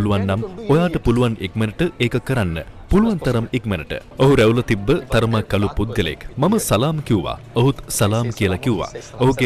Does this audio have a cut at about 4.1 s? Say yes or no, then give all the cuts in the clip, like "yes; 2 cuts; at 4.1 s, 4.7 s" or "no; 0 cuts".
yes; 1 cut; at 4.1 s